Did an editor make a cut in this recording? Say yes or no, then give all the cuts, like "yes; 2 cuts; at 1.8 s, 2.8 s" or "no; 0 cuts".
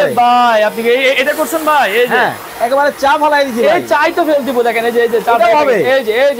yes; 1 cut; at 2.4 s